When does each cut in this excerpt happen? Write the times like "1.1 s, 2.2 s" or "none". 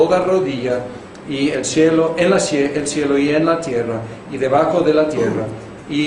3.1 s